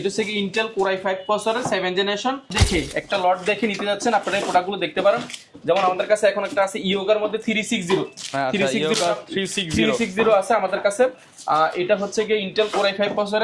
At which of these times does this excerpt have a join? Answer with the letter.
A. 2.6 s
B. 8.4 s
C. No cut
A